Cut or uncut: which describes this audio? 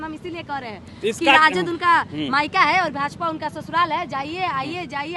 uncut